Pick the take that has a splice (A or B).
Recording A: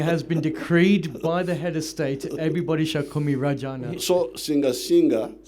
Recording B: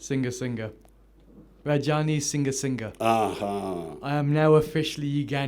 B